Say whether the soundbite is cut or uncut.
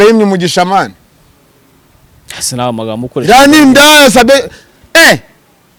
uncut